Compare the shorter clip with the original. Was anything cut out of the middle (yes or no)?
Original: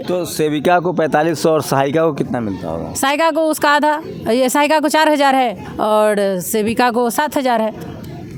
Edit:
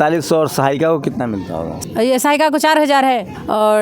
yes